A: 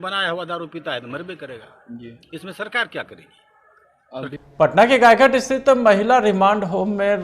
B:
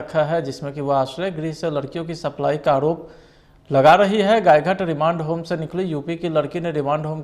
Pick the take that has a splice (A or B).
A